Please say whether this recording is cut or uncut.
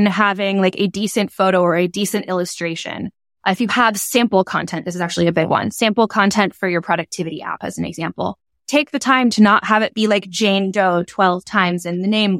uncut